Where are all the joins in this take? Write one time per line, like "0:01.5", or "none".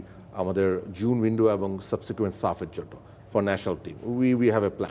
none